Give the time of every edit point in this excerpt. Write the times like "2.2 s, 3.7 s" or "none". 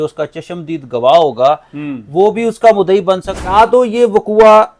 3.5 s